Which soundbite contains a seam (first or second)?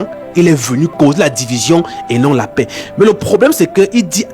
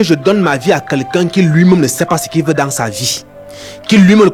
first